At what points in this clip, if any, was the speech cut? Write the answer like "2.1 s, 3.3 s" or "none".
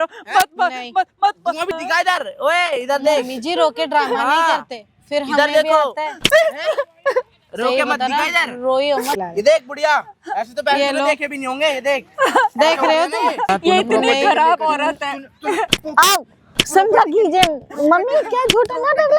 1.7 s, 9.2 s, 13.5 s